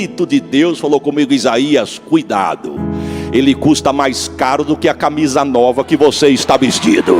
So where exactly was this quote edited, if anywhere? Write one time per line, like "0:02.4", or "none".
none